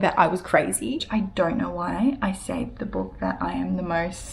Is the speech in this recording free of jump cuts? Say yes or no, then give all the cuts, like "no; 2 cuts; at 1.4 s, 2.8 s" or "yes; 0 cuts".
no; 1 cut; at 1.0 s